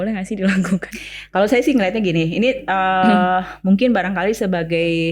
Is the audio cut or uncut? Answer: uncut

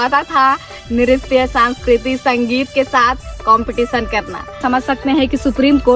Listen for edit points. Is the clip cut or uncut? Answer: cut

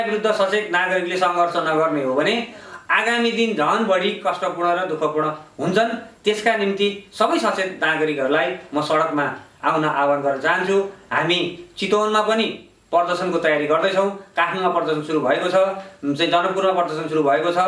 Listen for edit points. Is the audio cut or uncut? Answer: uncut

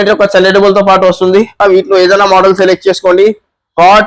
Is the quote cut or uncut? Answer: cut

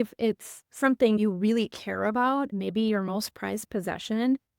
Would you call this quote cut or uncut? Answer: cut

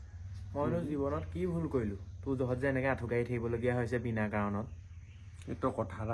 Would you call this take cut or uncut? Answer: uncut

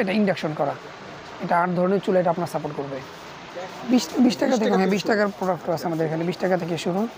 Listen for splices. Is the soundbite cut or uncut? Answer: cut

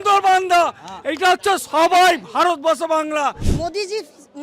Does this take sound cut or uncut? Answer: cut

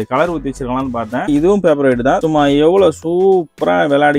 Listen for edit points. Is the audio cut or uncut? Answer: cut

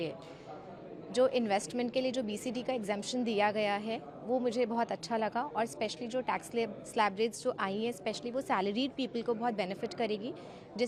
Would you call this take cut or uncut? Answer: uncut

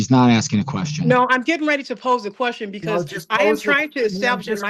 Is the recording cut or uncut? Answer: uncut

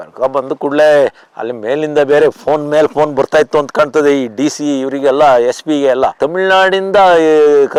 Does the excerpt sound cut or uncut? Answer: uncut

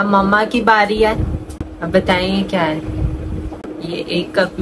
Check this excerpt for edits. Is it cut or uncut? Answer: cut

